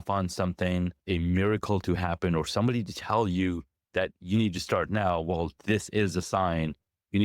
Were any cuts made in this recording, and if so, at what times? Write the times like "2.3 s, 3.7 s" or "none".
1.0 s